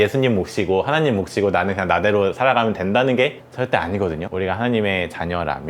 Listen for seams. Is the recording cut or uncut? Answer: cut